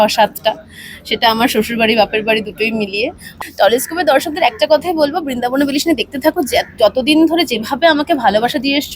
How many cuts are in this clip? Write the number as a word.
one